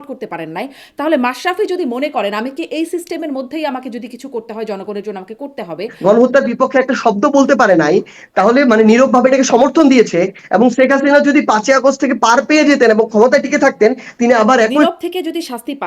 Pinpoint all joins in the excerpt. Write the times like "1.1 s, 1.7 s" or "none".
5.9 s, 14.8 s